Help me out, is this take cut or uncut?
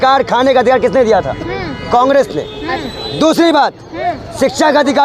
uncut